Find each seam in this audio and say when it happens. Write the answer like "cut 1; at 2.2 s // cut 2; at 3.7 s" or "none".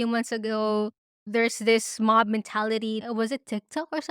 cut 1; at 3.0 s